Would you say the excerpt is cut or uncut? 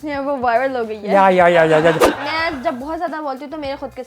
cut